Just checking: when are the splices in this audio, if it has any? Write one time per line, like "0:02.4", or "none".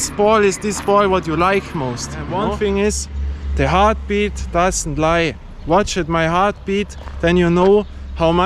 0:02.2